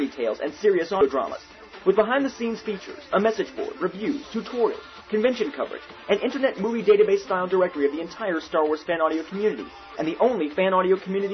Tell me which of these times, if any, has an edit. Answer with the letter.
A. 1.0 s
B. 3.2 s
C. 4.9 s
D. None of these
A